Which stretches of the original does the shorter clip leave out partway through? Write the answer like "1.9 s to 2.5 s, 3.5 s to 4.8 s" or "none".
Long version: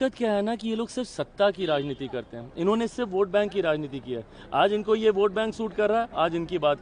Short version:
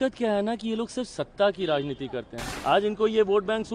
2.4 s to 4.3 s